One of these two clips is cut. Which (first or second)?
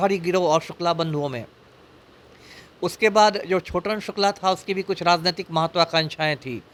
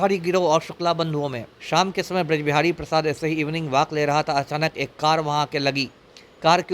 second